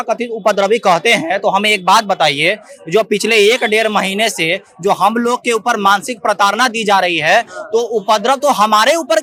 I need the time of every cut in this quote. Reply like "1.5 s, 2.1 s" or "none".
none